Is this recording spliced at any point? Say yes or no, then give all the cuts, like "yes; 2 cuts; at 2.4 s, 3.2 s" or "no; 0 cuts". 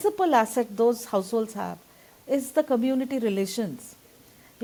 no; 0 cuts